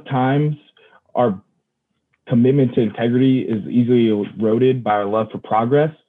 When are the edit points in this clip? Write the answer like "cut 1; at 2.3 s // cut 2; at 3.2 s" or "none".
none